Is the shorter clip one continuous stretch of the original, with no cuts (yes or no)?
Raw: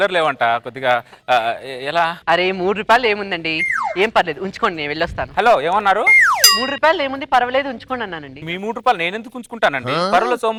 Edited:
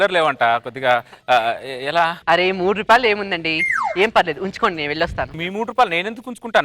no